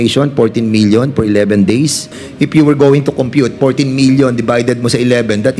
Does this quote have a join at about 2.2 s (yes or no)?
yes